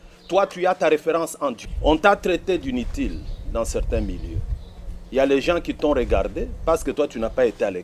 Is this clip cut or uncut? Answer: cut